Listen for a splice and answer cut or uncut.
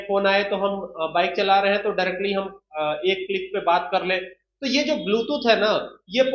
uncut